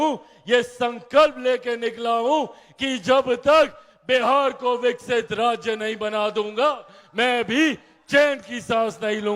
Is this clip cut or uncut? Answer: uncut